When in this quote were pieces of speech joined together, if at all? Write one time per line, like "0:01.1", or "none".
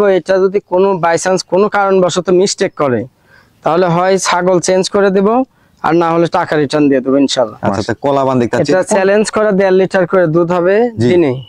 0:07.7